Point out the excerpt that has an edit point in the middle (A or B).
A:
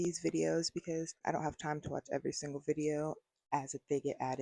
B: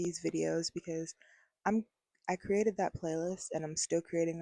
A